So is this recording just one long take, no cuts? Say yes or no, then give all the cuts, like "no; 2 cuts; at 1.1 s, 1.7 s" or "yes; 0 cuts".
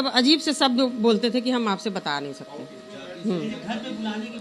yes; 0 cuts